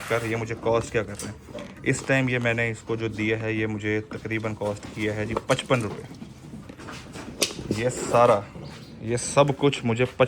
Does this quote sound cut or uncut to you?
uncut